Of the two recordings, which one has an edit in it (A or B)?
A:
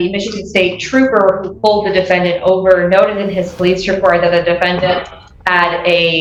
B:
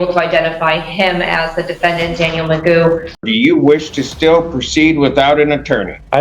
B